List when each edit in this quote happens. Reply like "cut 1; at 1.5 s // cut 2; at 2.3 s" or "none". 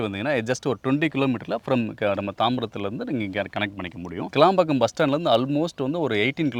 none